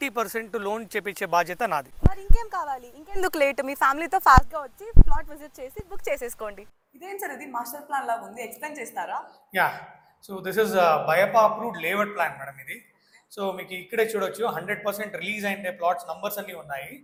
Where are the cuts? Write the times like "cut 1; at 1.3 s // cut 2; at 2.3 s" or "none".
none